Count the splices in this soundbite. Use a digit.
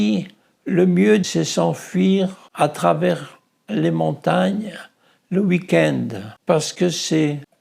1